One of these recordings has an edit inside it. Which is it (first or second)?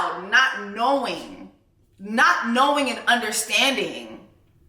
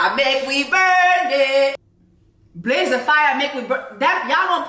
second